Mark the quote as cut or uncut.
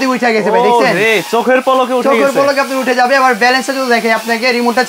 uncut